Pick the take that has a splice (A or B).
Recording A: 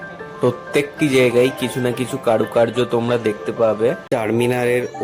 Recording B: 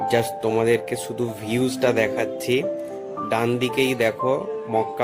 A